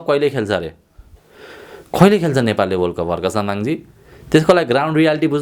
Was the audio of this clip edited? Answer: no; 0 cuts

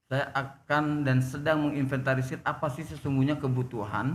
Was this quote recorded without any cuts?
yes; 0 cuts

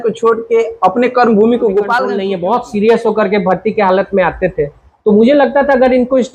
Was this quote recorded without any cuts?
no; 1 cut; at 2.2 s

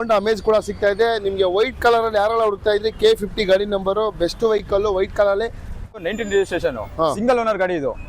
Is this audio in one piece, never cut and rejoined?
no; 1 cut; at 5.9 s

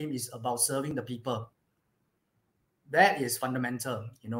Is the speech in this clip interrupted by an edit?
no; 0 cuts

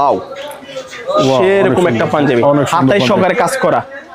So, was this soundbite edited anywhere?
no; 0 cuts

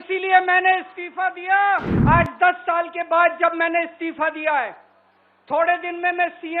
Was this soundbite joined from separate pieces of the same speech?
yes; 1 cut; at 1.9 s

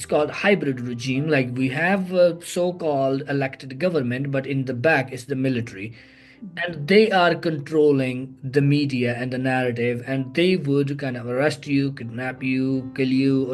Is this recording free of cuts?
yes; 0 cuts

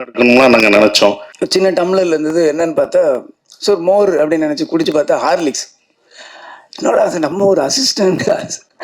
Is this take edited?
yes; 1 cut; at 1.3 s

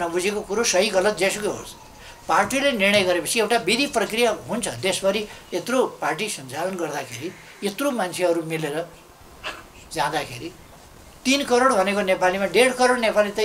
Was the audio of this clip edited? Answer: no; 0 cuts

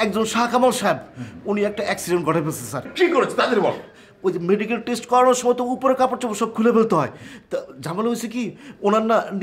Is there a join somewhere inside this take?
yes; 1 cut; at 2.9 s

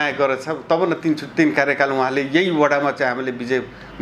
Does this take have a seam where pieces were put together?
no; 0 cuts

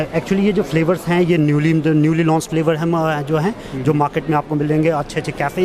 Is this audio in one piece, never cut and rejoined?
yes; 0 cuts

